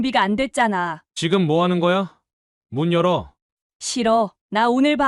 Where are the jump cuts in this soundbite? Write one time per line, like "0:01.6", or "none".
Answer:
0:01.0